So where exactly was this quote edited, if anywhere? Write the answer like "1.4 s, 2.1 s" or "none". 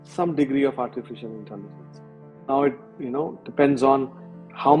2.9 s